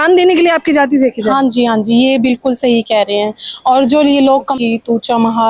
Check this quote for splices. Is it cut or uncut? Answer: cut